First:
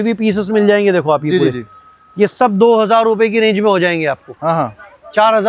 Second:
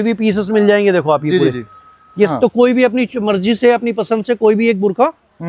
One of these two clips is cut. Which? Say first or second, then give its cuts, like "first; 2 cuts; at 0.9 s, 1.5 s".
second; 1 cut; at 2.3 s